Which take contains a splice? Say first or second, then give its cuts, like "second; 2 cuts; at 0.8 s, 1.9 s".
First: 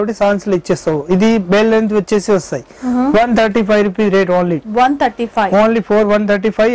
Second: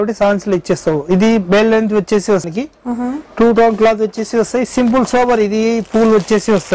second; 1 cut; at 2.5 s